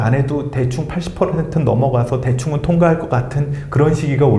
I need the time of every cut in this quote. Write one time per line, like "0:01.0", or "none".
none

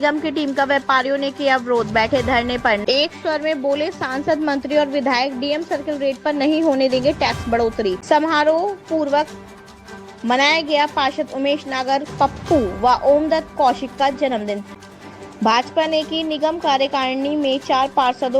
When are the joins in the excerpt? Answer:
0:02.8
0:08.0
0:14.8

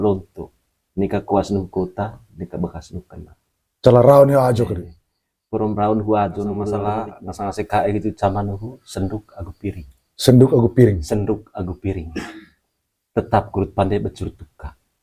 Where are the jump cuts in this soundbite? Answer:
0:07.2

